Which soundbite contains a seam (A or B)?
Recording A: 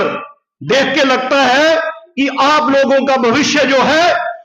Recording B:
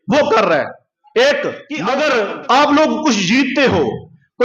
B